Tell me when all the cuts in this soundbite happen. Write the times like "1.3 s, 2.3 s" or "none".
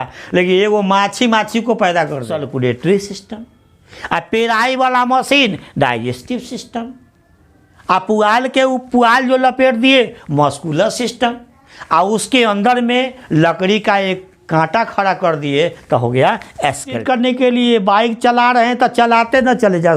2.4 s, 17.0 s